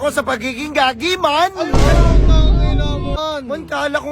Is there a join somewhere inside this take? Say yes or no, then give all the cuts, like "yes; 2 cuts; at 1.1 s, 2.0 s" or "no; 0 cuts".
yes; 1 cut; at 3.2 s